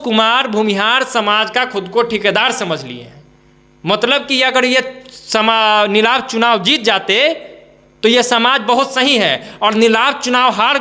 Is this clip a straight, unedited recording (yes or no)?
yes